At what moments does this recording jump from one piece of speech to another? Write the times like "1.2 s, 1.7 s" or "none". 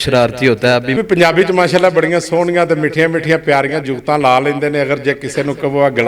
1.0 s